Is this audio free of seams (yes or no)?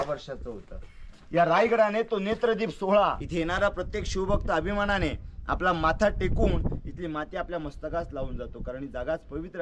no